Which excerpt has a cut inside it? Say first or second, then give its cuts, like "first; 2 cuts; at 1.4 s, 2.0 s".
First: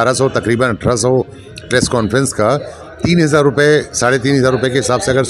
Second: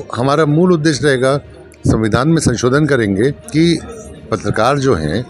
second; 1 cut; at 3.4 s